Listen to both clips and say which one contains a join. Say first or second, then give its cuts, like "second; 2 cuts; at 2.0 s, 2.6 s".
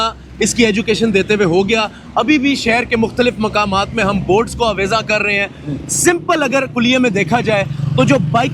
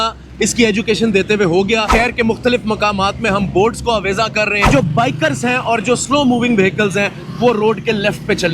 second; 2 cuts; at 1.9 s, 4.7 s